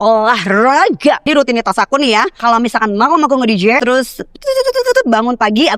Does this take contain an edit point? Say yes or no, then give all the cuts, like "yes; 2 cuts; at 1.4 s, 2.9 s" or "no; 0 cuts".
yes; 3 cuts; at 1.3 s, 2.3 s, 3.8 s